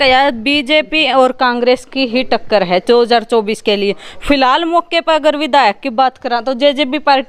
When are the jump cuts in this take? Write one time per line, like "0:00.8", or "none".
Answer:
none